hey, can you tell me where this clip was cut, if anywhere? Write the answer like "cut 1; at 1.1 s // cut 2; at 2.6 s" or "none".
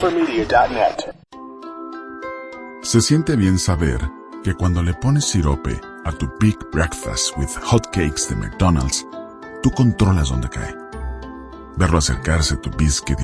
cut 1; at 1.1 s